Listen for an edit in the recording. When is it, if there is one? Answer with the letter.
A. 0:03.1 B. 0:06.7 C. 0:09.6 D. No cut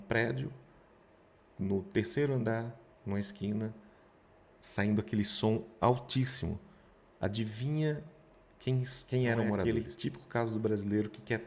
C